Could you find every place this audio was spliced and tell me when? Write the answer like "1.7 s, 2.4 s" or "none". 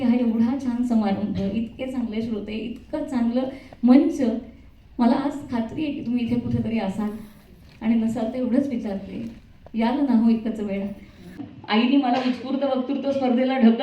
11.5 s

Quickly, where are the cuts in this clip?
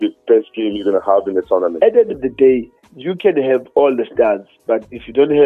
1.7 s

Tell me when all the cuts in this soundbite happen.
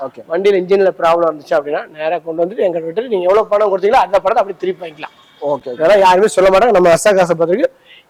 none

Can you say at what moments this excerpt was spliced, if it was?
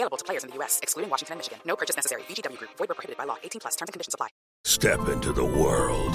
4.7 s

